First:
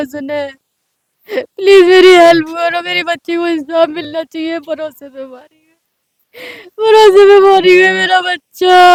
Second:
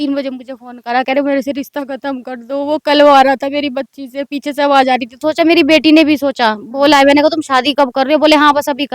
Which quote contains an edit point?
second; 1 cut; at 5.2 s

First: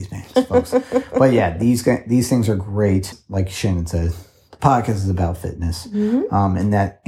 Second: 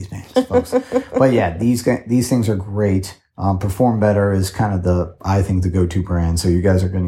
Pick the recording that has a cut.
first; 1 cut; at 3.2 s

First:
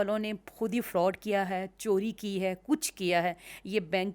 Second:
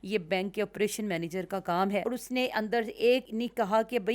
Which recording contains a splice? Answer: second; 2 cuts; at 2.0 s, 3.3 s

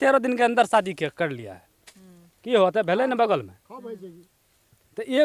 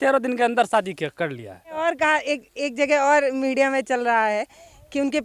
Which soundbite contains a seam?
second; 1 cut; at 1.8 s

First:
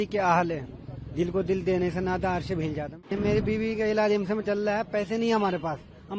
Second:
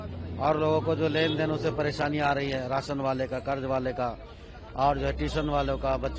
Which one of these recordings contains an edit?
first; 1 cut; at 3.1 s

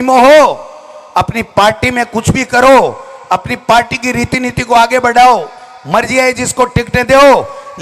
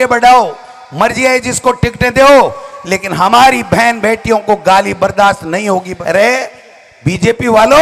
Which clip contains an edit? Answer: second; 1 cut; at 5.9 s

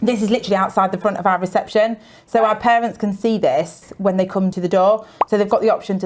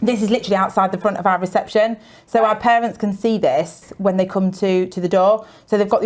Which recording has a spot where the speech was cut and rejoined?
first; 1 cut; at 4.5 s

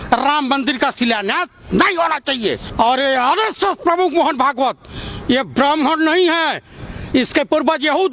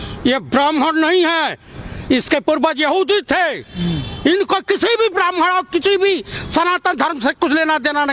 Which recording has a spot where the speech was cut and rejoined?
first; 1 cut; at 2.7 s

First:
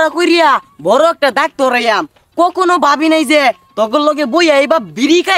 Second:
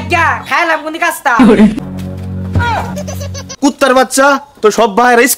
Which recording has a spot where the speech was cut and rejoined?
second; 1 cut; at 1.8 s

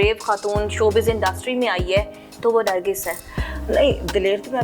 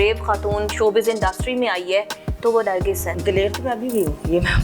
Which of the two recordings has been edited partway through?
second; 1 cut; at 3.2 s

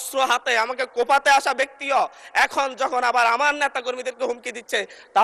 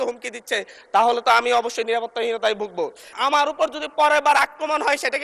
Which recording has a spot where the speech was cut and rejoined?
second; 1 cut; at 3.1 s

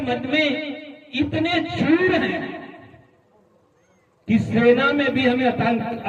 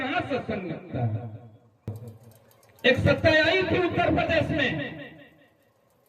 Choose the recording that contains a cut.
second; 1 cut; at 1.9 s

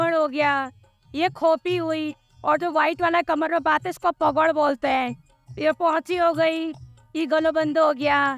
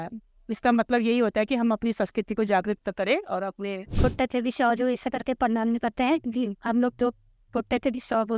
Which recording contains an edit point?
second; 1 cut; at 3.8 s

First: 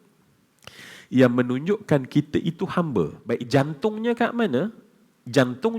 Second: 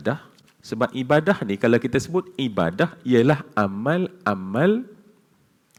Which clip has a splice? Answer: first; 1 cut; at 3.2 s

